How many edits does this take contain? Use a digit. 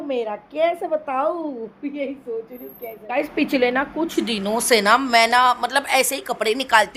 0